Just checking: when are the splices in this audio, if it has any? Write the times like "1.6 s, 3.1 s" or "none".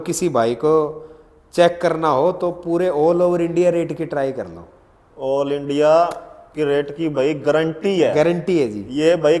none